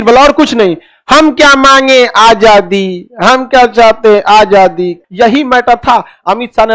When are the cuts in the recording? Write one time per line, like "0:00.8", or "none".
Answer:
0:05.0